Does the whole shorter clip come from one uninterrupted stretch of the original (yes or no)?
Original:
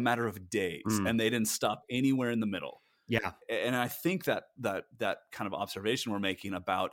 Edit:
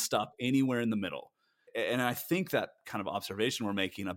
no